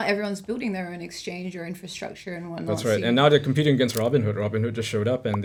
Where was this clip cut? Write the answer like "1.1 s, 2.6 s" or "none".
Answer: none